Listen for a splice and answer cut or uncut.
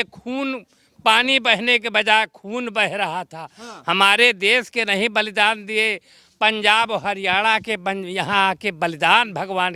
uncut